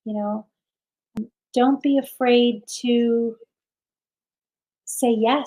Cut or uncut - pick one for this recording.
cut